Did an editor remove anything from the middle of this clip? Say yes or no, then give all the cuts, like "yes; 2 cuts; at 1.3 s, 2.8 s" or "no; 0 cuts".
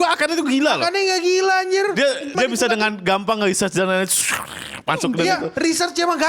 yes; 1 cut; at 2.3 s